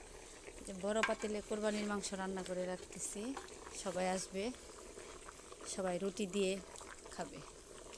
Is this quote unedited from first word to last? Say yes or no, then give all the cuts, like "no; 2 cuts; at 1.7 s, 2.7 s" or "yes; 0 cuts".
yes; 0 cuts